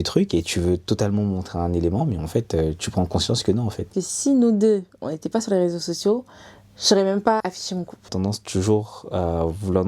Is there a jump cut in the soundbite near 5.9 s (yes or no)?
no